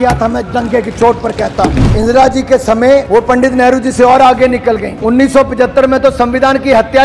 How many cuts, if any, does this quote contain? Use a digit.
3